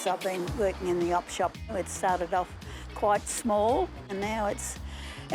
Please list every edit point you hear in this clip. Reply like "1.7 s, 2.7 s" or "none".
1.7 s, 4.1 s